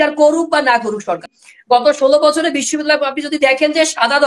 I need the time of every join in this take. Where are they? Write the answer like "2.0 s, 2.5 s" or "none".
1.2 s

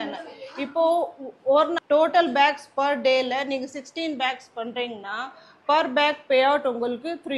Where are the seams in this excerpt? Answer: 1.8 s

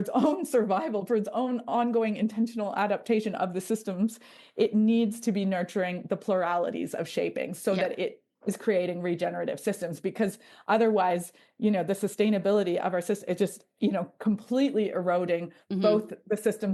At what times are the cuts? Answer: none

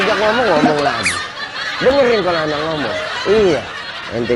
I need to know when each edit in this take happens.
none

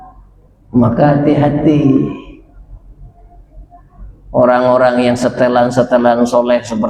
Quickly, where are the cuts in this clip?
none

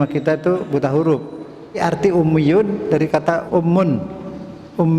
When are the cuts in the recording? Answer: 1.8 s, 3.4 s

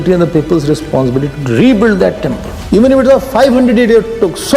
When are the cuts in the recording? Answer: 2.5 s

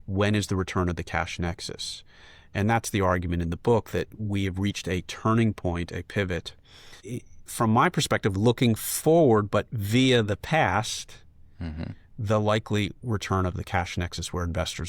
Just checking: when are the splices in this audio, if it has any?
7.1 s

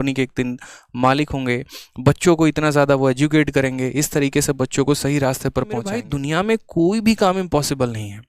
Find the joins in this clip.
6.1 s

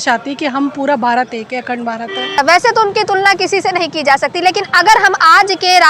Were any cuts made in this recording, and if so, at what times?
2.4 s

